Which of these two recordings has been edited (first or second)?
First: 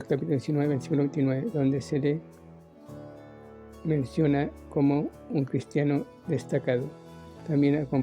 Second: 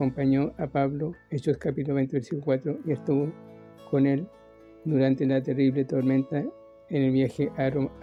first